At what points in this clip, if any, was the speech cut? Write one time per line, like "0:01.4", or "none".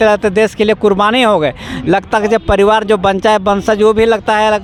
none